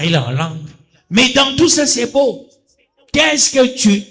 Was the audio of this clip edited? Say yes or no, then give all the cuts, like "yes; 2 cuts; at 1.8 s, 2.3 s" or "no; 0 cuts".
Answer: no; 0 cuts